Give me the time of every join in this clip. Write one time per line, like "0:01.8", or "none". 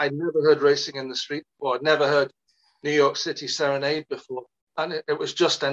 0:04.6